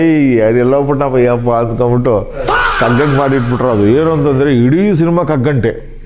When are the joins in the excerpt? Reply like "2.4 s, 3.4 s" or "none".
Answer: none